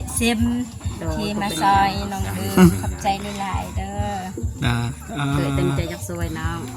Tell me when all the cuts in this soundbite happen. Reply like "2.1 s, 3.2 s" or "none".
none